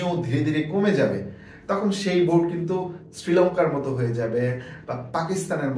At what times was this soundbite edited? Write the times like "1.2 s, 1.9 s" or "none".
none